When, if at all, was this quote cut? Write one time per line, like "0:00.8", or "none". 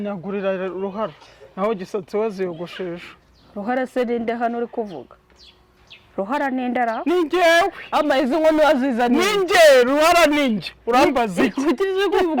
none